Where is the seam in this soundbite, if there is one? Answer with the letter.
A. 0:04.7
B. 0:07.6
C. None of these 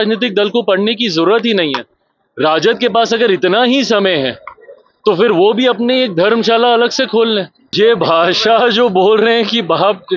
B